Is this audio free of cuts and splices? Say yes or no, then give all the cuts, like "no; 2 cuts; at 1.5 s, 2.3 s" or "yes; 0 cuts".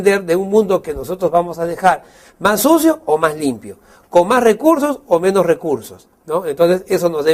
no; 1 cut; at 4.2 s